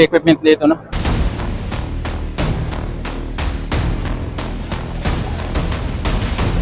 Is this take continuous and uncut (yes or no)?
no